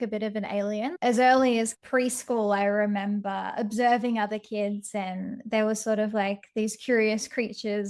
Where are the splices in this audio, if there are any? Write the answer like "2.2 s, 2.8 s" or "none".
0.9 s, 1.8 s